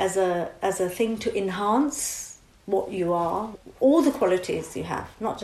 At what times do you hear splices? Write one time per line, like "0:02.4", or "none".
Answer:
0:03.5